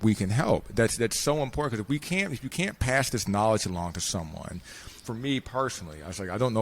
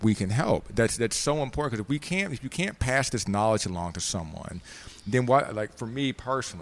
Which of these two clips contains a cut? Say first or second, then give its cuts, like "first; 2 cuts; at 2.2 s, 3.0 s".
first; 1 cut; at 5.0 s